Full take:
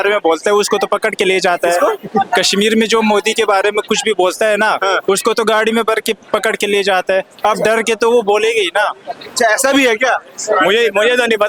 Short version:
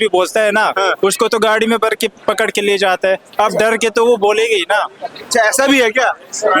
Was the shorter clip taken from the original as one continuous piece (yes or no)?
yes